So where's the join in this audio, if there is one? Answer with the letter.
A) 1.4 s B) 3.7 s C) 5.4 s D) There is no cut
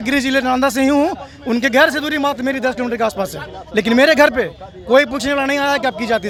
D